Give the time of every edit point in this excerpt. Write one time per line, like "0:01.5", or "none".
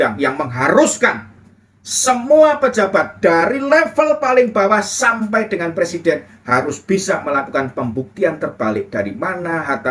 none